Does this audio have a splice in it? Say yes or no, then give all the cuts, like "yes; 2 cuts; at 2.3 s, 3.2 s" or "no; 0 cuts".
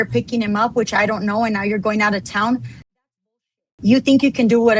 no; 0 cuts